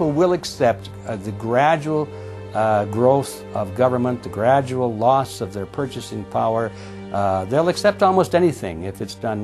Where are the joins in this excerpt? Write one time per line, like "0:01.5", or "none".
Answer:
none